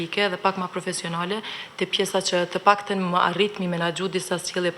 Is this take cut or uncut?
uncut